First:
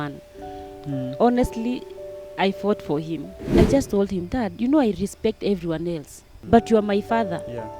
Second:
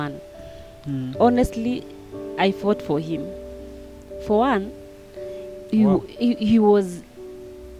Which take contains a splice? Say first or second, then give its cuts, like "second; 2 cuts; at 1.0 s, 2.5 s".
first; 2 cuts; at 3.4 s, 6.3 s